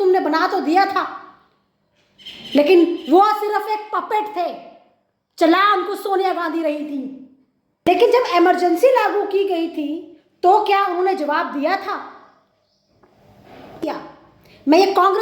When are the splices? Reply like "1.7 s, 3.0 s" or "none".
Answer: 7.9 s, 13.8 s